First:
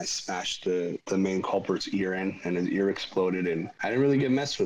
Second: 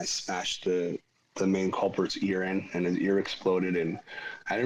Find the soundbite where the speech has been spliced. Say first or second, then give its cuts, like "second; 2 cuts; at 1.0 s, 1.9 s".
first; 2 cuts; at 1.0 s, 3.7 s